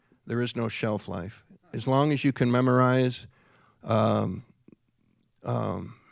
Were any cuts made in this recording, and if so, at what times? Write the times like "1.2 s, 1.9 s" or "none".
1.6 s